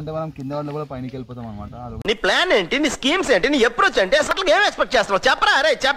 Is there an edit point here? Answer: no; 0 cuts

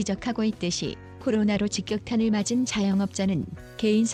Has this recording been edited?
no; 0 cuts

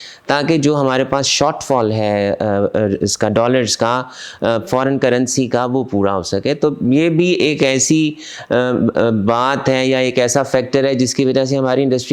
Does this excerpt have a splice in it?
no; 0 cuts

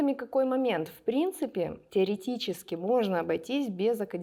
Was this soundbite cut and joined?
no; 0 cuts

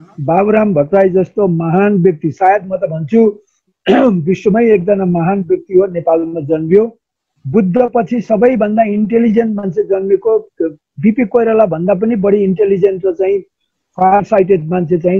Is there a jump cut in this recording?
no; 0 cuts

